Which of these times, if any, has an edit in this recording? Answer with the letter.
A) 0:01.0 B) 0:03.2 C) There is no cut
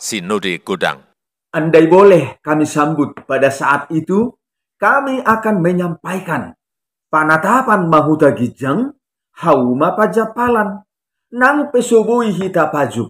A